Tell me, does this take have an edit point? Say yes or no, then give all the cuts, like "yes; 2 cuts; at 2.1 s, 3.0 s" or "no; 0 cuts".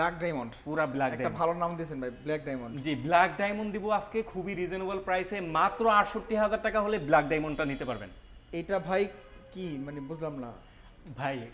no; 0 cuts